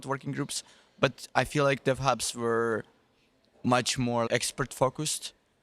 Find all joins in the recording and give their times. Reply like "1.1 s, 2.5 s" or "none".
4.3 s